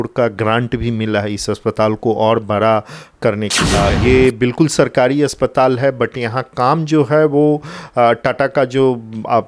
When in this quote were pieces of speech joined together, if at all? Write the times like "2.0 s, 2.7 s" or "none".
3.6 s